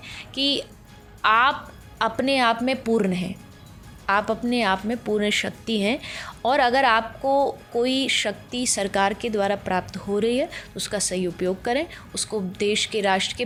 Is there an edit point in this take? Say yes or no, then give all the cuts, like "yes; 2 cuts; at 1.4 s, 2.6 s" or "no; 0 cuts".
no; 0 cuts